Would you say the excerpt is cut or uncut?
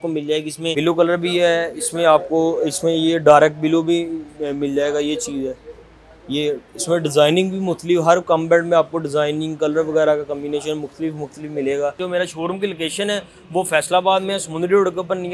cut